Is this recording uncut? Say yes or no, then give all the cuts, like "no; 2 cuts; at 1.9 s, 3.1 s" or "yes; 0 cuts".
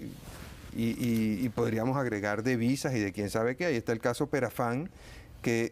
yes; 0 cuts